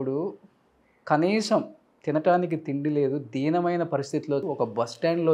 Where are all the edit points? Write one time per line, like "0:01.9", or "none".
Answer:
0:04.4